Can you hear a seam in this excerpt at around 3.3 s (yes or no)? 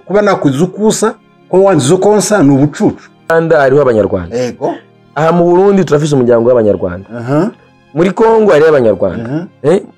yes